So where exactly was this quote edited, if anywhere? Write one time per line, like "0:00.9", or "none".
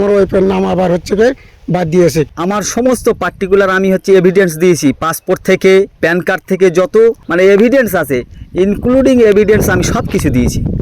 0:02.3
0:05.9
0:07.2